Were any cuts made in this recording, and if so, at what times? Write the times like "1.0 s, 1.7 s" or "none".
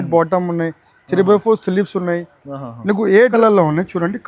3.3 s